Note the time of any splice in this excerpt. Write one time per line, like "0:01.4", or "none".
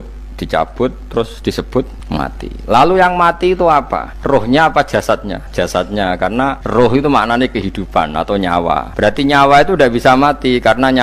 0:04.1
0:05.4
0:06.6
0:08.9